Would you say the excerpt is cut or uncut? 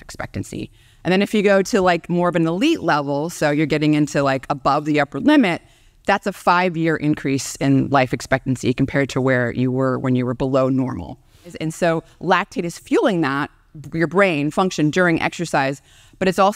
cut